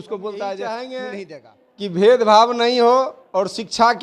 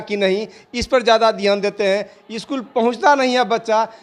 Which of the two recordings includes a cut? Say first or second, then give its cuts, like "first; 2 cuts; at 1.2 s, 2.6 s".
first; 1 cut; at 1.1 s